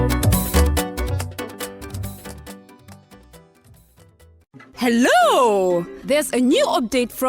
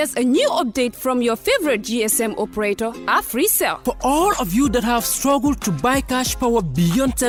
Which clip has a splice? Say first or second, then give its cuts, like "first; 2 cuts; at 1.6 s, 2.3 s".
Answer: first; 1 cut; at 4.4 s